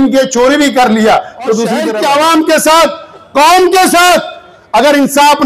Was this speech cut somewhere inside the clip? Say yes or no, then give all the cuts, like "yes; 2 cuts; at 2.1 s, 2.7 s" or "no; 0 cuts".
yes; 1 cut; at 1.8 s